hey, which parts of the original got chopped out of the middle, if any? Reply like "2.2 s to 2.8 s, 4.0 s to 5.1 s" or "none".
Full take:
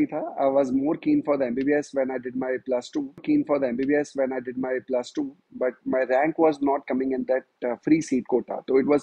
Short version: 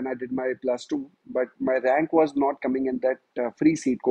3.1 s to 5.3 s